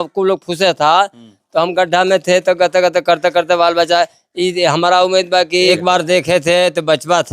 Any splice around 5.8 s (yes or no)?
yes